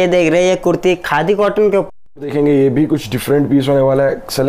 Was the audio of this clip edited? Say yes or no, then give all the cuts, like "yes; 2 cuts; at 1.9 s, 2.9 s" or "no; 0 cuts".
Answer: no; 0 cuts